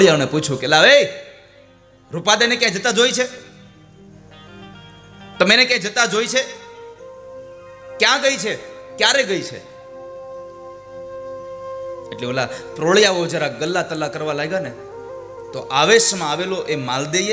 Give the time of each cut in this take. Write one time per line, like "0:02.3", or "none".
0:04.1